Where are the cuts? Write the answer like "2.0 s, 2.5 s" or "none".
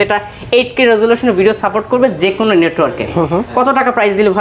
none

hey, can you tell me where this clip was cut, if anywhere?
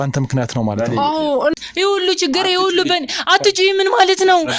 1.5 s

